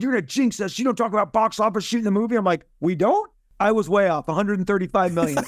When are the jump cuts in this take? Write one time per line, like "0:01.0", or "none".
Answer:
0:03.4